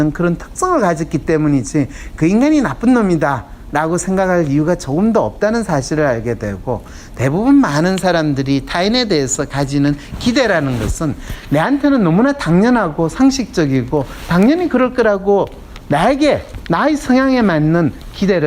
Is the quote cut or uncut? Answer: uncut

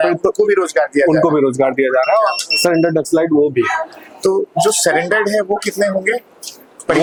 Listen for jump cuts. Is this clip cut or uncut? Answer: uncut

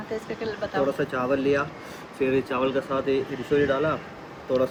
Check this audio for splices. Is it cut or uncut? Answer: uncut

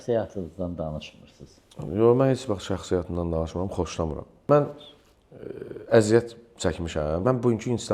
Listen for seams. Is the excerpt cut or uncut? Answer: cut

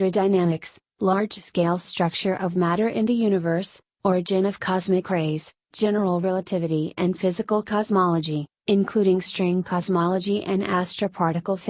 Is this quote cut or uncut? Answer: uncut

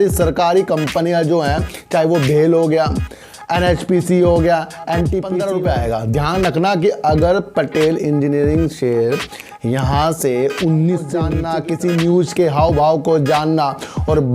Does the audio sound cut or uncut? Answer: cut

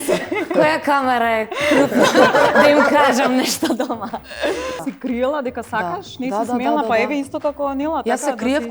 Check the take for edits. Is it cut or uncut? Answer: cut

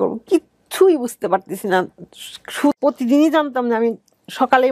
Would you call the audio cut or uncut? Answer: cut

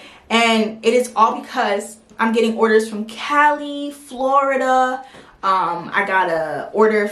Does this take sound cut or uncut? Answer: cut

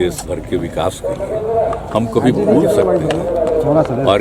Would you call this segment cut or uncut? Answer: uncut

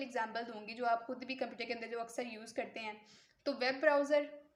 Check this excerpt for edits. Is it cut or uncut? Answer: uncut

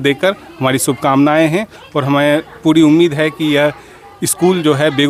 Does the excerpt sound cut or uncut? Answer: uncut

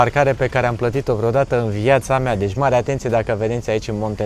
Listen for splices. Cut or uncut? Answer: uncut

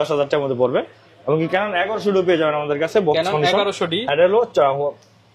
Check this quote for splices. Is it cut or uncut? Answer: uncut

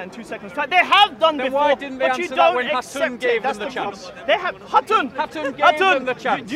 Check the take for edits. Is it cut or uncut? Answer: uncut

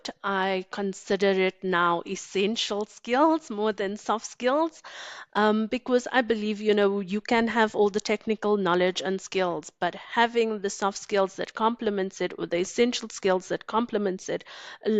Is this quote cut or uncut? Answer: uncut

